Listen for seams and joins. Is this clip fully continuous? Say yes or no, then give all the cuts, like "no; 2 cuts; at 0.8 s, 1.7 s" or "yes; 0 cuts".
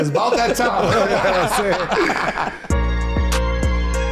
no; 1 cut; at 2.7 s